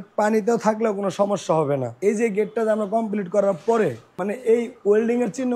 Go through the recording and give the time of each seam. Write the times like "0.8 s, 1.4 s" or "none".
1.9 s, 4.1 s